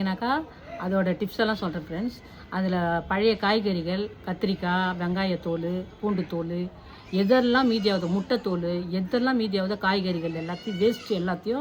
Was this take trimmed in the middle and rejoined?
no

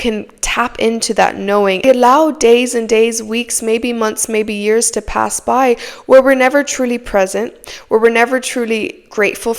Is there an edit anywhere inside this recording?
yes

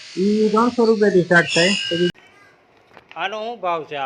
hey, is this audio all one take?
no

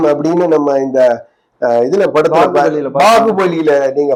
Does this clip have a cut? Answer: no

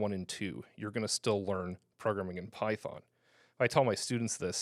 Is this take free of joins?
yes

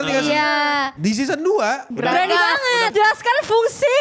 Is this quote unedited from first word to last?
no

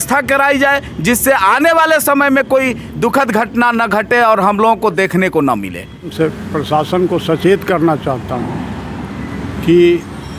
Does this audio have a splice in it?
yes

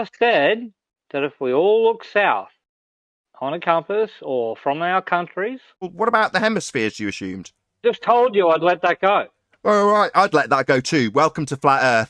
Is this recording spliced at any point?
yes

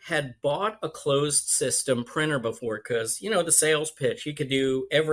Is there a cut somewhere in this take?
no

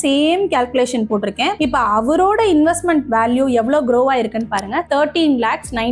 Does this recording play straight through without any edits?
no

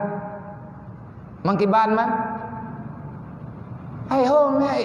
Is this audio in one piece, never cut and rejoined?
yes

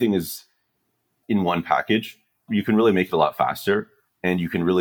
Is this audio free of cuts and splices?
no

